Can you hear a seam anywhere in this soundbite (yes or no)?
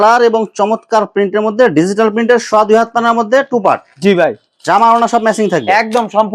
no